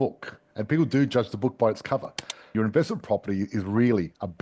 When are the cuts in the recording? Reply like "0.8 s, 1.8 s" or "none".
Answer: 2.5 s